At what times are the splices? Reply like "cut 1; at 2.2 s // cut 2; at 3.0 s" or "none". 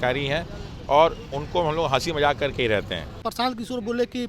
cut 1; at 3.2 s